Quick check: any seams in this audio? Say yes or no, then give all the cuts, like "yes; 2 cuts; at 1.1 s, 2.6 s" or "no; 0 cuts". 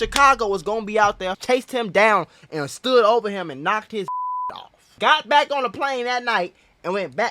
yes; 2 cuts; at 1.3 s, 4.9 s